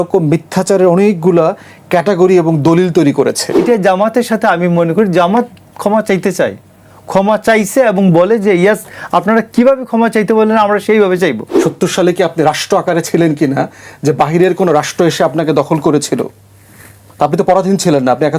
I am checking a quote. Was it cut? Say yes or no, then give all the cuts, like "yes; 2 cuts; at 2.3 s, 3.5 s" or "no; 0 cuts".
yes; 2 cuts; at 3.6 s, 11.5 s